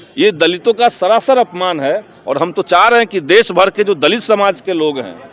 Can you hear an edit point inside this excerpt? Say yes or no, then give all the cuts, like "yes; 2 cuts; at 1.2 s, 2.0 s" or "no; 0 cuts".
no; 0 cuts